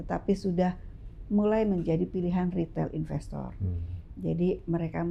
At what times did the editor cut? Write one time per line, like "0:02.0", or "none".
none